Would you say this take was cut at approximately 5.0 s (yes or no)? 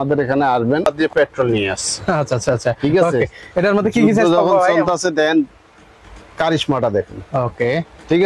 no